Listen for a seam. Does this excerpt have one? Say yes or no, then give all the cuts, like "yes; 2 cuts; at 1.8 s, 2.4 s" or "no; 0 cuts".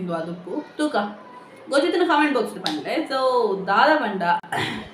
no; 0 cuts